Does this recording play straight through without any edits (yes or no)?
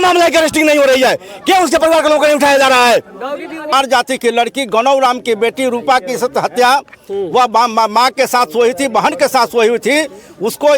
no